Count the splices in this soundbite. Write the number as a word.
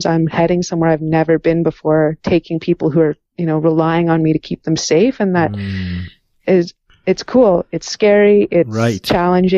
one